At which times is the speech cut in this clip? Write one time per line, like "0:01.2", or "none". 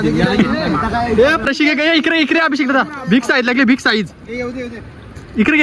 0:01.4

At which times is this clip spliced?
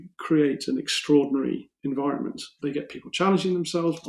0:02.5

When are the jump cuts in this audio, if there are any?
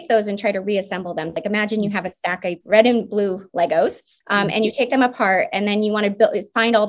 0:01.3
0:02.6
0:04.1

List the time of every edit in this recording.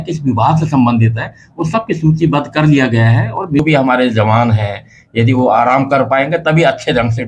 0:03.6

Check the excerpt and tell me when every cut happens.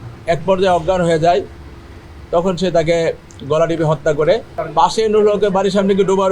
0:04.6

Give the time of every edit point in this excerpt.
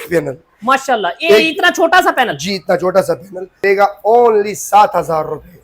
0:03.4

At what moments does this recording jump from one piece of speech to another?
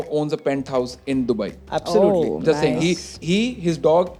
none

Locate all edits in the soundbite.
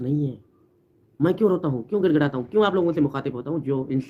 none

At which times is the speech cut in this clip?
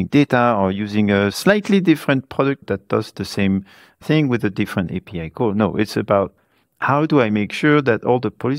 0:01.4
0:02.6
0:04.0

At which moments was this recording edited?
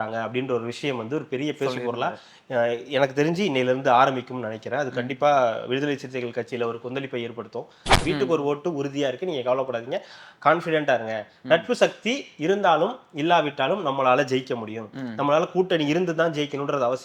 0:08.0

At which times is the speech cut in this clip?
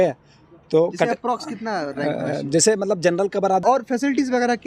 0:03.6

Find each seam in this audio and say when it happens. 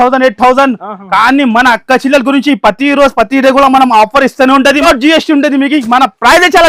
0:04.8

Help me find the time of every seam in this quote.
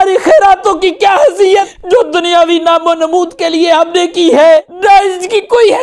0:01.8
0:04.7

